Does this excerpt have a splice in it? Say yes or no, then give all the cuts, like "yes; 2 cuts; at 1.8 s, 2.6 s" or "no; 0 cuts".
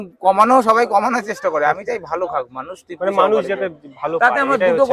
no; 0 cuts